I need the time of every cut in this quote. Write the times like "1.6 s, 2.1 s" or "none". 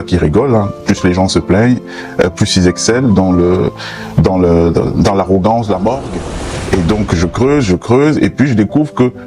6.2 s